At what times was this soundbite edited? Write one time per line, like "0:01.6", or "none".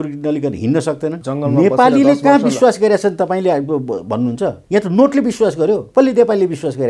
0:01.2
0:04.6
0:05.9